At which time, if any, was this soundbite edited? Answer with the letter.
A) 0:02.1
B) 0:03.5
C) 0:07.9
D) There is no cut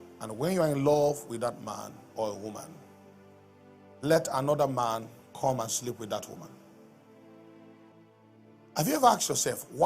C